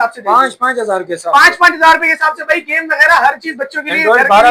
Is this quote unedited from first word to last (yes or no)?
yes